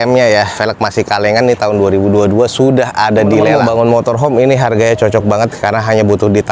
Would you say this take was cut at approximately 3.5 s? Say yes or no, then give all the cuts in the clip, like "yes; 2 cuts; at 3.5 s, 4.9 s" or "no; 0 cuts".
yes; 1 cut; at 3.5 s